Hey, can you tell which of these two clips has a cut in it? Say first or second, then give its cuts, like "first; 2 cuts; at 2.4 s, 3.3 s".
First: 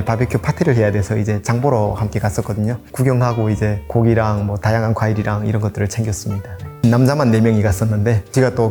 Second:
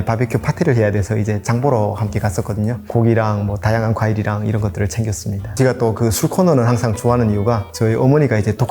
second; 3 cuts; at 2.8 s, 5.5 s, 7.7 s